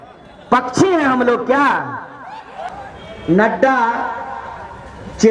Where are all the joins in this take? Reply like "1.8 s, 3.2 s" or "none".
2.7 s